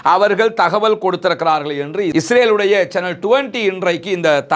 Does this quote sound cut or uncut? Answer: uncut